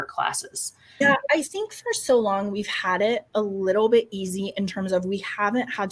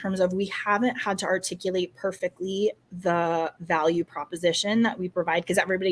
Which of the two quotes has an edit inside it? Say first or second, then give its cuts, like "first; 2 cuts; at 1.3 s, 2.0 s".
first; 1 cut; at 1.0 s